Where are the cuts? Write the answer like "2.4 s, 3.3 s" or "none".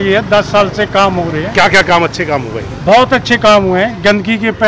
none